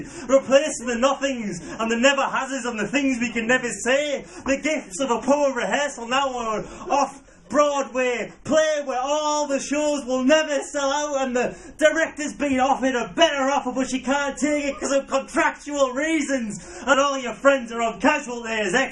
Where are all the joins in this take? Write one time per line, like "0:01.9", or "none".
0:17.0

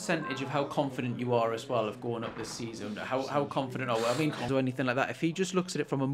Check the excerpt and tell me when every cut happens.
0:04.5

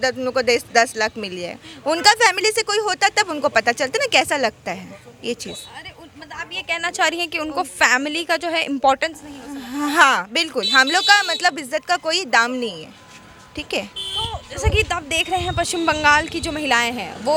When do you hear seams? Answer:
none

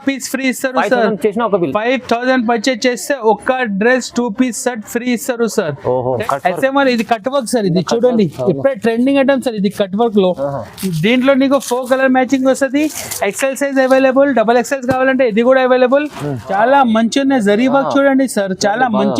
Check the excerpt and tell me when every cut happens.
0:06.2
0:16.4

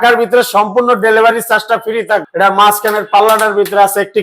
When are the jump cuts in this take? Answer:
0:02.3

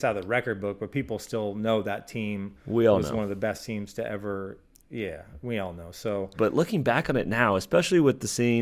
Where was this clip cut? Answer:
0:06.3

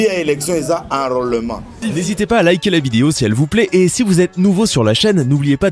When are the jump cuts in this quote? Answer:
0:01.7

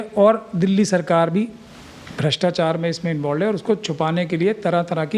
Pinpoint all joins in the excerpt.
none

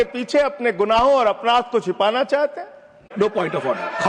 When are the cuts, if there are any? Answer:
0:03.1

